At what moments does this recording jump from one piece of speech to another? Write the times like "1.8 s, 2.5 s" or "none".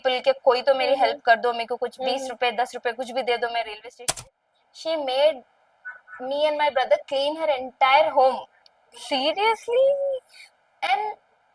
4.2 s